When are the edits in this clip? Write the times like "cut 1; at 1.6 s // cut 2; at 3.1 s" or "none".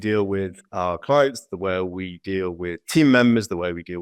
none